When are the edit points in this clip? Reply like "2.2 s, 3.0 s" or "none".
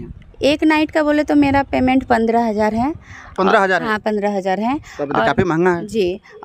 none